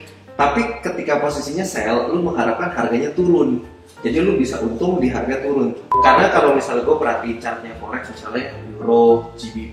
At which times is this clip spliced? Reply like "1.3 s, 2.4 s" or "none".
5.9 s